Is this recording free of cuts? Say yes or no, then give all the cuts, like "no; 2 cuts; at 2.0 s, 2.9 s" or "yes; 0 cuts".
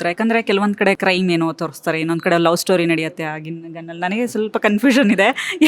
no; 1 cut; at 1.0 s